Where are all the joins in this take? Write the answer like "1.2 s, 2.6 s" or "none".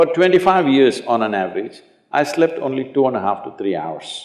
none